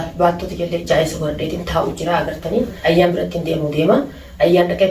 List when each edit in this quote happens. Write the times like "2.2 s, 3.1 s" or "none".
2.7 s